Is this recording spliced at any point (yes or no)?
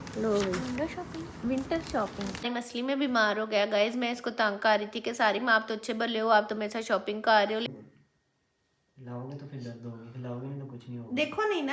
yes